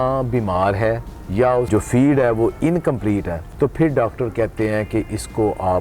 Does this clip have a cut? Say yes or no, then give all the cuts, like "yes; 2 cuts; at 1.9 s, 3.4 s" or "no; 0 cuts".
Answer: yes; 2 cuts; at 1.3 s, 3.4 s